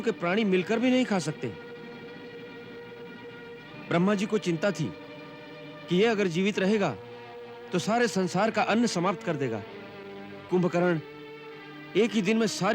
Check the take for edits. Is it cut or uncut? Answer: cut